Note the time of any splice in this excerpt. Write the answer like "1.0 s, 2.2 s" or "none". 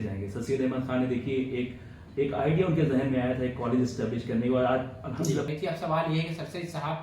5.5 s